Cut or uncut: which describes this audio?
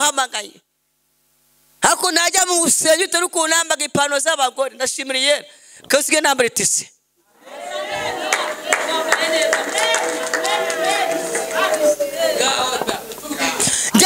uncut